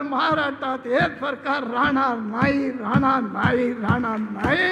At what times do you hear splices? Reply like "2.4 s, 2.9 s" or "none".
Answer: none